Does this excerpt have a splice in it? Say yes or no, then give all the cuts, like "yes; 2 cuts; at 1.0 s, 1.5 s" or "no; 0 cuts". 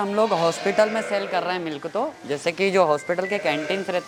no; 0 cuts